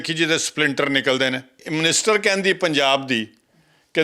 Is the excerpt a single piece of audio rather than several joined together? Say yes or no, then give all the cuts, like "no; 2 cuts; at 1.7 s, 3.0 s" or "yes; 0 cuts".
no; 1 cut; at 1.6 s